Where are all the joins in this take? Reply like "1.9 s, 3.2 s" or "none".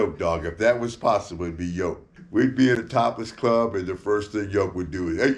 2.1 s